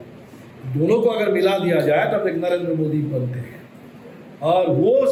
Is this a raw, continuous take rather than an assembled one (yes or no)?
yes